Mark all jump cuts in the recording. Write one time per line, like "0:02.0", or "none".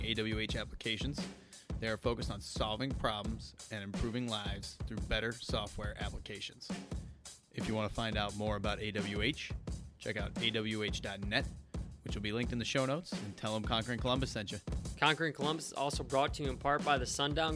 0:14.8